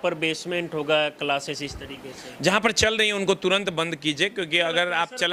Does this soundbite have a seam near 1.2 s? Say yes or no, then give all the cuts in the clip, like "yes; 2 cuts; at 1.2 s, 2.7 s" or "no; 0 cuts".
no; 0 cuts